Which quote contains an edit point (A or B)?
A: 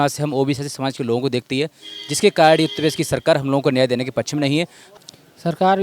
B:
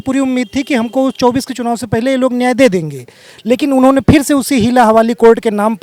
A